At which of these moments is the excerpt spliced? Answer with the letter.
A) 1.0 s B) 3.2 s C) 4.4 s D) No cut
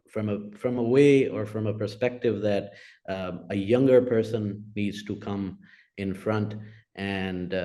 D